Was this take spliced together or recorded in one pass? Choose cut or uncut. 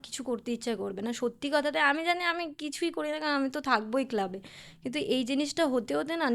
uncut